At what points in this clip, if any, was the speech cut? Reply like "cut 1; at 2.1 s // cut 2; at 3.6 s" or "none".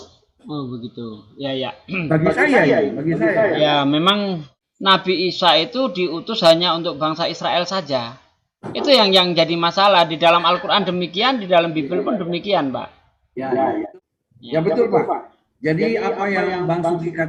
cut 1; at 4.5 s // cut 2; at 13.9 s

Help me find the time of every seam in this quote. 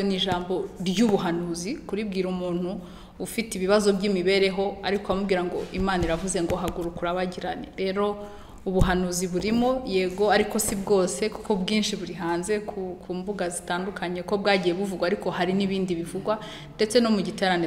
none

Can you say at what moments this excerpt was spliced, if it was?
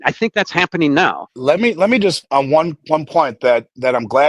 cut 1; at 1.3 s // cut 2; at 2.6 s

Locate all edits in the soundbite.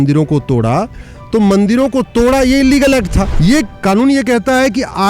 cut 1; at 3.2 s

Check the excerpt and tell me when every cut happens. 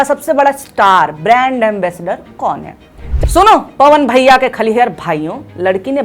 cut 1; at 3.1 s

